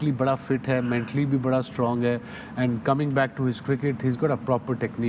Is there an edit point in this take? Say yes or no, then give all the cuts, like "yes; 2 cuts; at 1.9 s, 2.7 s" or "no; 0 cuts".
no; 0 cuts